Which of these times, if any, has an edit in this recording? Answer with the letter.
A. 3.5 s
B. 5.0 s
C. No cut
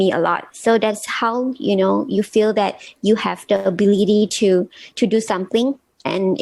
C